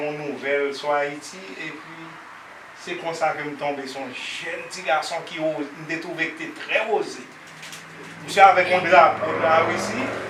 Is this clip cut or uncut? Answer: uncut